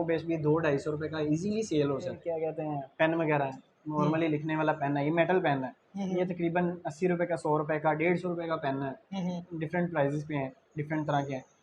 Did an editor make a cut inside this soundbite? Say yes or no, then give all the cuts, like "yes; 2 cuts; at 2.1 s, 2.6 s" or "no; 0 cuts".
yes; 1 cut; at 2.2 s